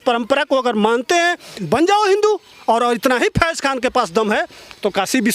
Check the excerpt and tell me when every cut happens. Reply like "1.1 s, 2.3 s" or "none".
1.6 s